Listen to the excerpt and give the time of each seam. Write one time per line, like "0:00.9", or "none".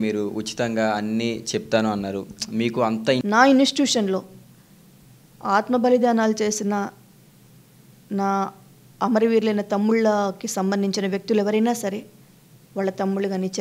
0:03.2